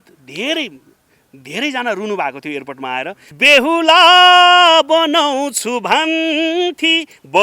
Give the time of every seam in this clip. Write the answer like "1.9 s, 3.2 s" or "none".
3.2 s